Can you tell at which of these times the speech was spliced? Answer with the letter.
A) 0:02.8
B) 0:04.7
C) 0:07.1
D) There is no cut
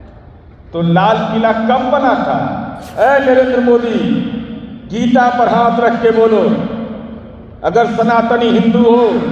A